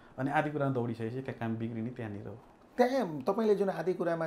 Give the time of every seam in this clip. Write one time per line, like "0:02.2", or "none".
none